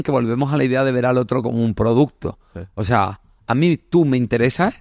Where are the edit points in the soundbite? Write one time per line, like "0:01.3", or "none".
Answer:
none